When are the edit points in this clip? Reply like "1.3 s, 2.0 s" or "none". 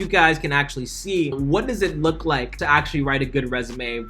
1.3 s, 2.6 s